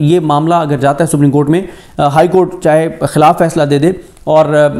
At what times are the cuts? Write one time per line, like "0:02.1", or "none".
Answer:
none